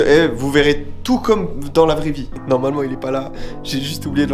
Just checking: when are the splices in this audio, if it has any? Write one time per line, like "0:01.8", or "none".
0:02.4